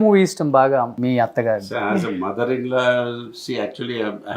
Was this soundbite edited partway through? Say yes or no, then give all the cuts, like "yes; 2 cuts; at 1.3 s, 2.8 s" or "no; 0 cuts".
yes; 1 cut; at 0.9 s